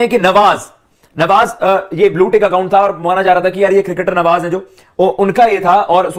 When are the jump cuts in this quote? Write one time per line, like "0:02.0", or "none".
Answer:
none